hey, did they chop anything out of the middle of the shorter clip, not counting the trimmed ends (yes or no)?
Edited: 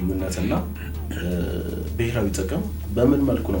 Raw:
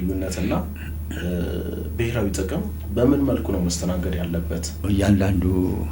no